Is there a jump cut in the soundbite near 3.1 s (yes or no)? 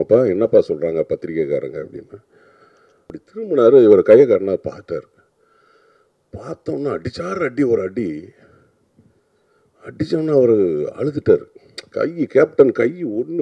yes